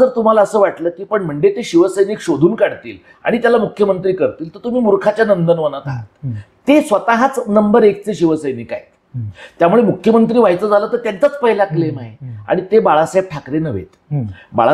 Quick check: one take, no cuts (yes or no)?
yes